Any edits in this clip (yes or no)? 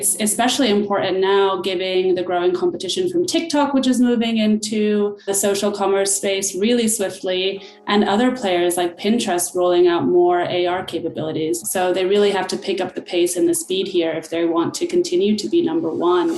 yes